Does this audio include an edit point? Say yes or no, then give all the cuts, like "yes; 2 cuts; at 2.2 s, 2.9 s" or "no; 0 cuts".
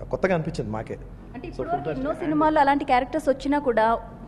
no; 0 cuts